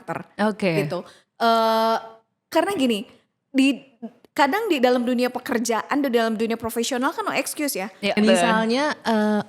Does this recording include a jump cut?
yes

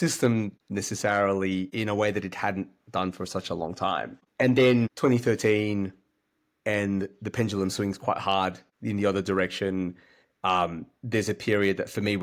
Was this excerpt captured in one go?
yes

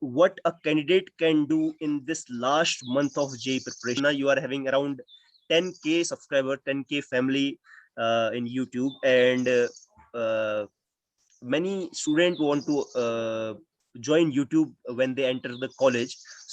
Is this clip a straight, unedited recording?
no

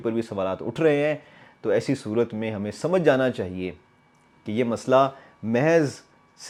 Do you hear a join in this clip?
no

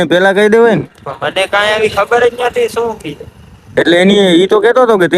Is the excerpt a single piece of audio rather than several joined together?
yes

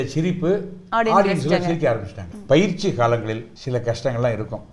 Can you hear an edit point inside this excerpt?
yes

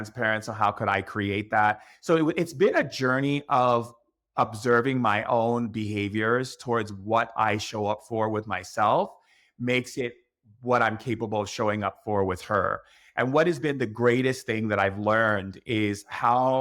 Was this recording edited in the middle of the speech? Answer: no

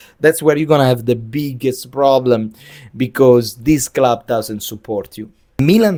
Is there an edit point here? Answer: no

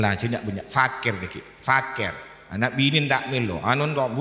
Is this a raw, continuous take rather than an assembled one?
yes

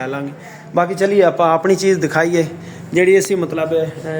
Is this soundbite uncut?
yes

